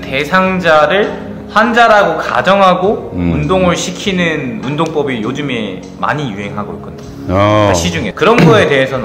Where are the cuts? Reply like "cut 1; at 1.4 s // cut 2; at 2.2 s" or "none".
cut 1; at 8.1 s